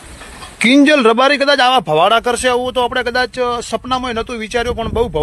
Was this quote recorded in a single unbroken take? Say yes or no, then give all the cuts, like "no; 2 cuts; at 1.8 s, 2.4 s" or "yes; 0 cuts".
yes; 0 cuts